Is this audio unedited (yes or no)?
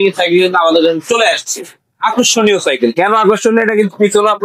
yes